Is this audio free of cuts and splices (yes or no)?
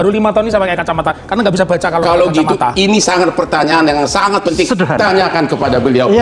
yes